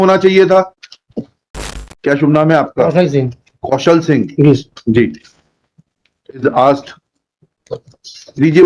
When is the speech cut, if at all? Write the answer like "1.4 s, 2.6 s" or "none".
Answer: 1.9 s